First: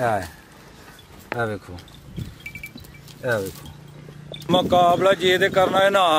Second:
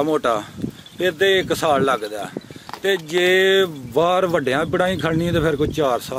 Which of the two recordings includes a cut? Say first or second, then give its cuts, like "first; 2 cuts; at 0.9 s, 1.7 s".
first; 1 cut; at 4.5 s